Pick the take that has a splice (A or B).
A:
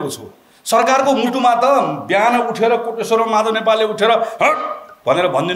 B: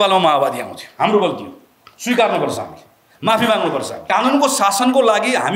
B